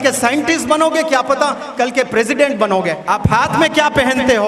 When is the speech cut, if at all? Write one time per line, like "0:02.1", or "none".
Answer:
0:03.0